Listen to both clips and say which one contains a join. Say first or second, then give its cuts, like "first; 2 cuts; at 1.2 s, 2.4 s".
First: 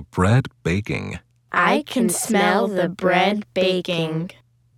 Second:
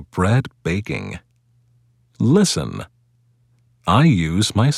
second; 2 cuts; at 1.4 s, 3.1 s